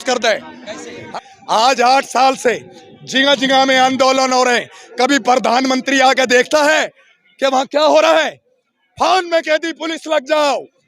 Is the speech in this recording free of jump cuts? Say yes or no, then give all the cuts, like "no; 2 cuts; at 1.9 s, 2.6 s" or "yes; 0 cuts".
no; 1 cut; at 1.1 s